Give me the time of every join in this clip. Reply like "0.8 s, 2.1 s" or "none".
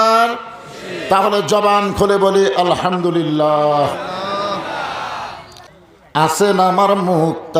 6.3 s

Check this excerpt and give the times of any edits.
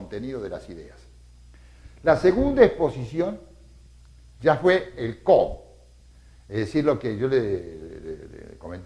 2.9 s

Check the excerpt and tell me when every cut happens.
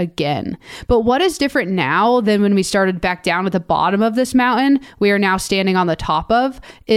none

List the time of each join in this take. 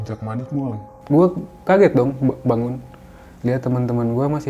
0.9 s

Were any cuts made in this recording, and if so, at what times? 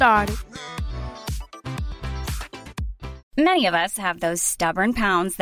3.2 s

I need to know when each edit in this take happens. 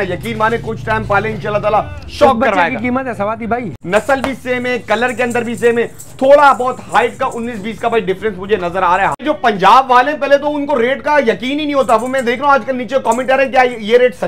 3.7 s, 9.2 s

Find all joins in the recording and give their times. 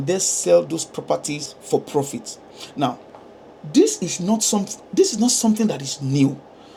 none

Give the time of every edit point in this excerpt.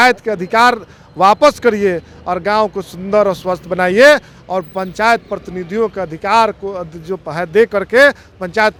none

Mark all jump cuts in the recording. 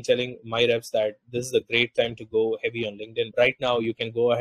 none

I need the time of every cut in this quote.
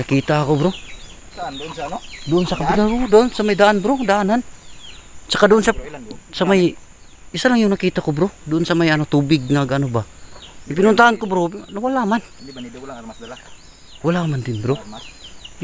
none

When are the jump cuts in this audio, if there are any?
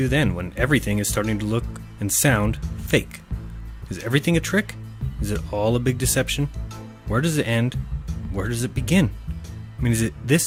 none

